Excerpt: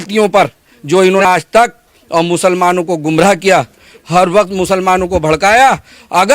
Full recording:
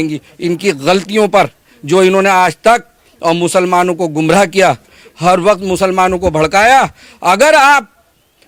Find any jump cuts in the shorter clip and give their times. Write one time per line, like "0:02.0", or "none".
0:01.2